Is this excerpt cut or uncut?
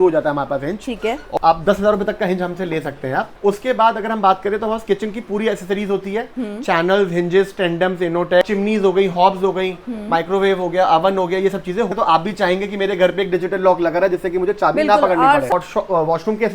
cut